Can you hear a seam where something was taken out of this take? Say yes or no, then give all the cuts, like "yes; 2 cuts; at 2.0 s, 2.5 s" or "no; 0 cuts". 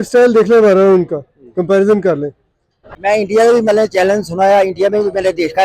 yes; 1 cut; at 2.9 s